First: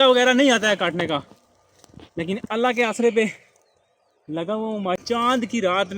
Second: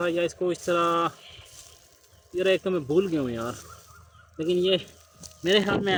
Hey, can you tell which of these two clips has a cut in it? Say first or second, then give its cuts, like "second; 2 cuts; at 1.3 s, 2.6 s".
first; 1 cut; at 5.0 s